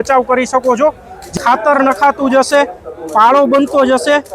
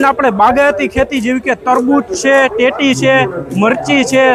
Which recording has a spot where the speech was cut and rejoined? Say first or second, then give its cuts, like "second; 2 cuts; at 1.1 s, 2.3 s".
first; 1 cut; at 1.2 s